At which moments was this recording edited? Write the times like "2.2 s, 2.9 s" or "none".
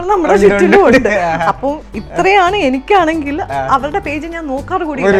none